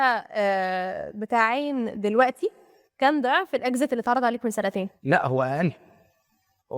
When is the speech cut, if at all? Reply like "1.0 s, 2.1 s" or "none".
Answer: 4.9 s